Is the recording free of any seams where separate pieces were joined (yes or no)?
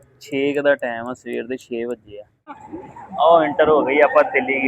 no